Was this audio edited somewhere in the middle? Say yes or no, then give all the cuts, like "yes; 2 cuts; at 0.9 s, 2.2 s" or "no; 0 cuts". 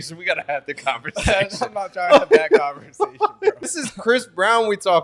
yes; 1 cut; at 3.6 s